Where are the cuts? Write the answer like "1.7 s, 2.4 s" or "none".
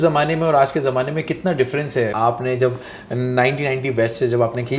2.1 s